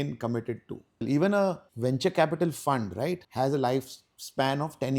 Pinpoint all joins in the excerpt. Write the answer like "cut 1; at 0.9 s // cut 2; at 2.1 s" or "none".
cut 1; at 1.0 s // cut 2; at 1.7 s // cut 3; at 3.2 s